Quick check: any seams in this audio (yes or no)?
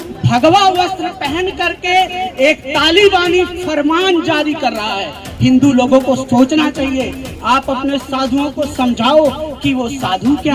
no